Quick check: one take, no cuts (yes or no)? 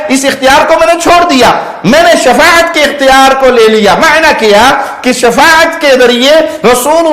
yes